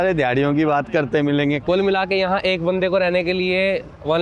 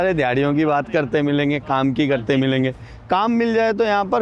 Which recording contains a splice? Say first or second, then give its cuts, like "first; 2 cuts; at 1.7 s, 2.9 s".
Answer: first; 1 cut; at 1.6 s